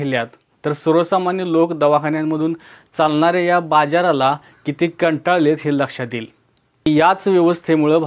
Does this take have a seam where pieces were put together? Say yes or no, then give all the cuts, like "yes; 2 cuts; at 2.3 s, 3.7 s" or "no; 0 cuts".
yes; 1 cut; at 6.9 s